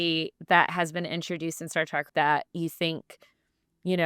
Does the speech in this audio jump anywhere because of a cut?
yes; 1 cut; at 2.1 s

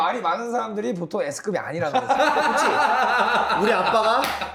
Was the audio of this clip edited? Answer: no; 0 cuts

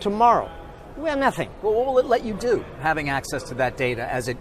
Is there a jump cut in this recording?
no; 0 cuts

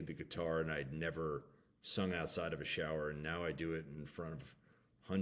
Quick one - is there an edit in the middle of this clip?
no; 0 cuts

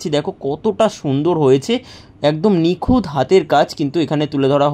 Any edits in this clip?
no; 0 cuts

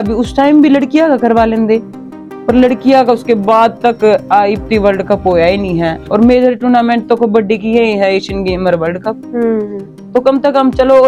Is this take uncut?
yes; 0 cuts

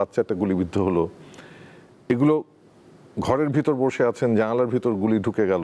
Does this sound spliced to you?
no; 0 cuts

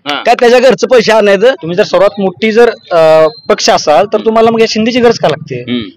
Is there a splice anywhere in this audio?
yes; 1 cut; at 1.6 s

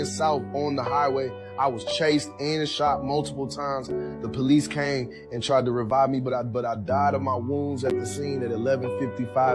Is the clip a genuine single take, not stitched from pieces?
no; 1 cut; at 2.9 s

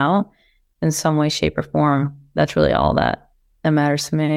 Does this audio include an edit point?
no; 0 cuts

